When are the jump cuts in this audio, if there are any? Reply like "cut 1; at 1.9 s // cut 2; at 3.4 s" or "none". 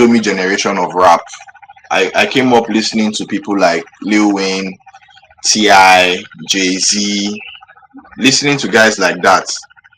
none